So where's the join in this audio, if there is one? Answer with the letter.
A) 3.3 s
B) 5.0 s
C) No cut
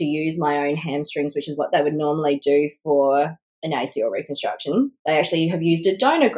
B